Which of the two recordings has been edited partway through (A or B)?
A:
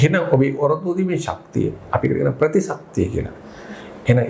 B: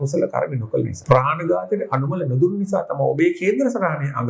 B